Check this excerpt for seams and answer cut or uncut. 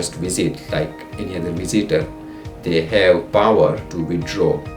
cut